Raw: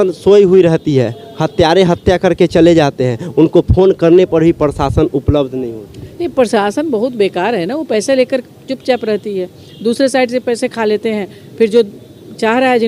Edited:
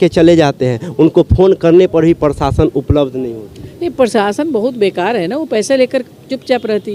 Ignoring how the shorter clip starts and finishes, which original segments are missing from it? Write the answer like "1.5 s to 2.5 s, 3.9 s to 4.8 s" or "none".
none